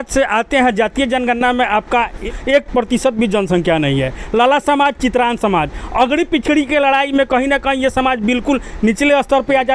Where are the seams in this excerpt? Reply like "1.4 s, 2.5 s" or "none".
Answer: 2.2 s